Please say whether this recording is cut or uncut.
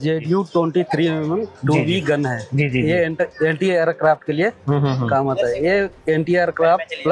uncut